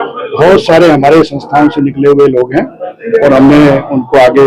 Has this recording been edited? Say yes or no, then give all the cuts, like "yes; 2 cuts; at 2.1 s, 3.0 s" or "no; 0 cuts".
no; 0 cuts